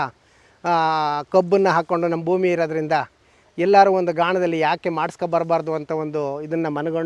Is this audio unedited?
yes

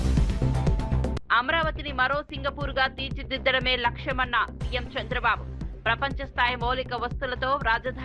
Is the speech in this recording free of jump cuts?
no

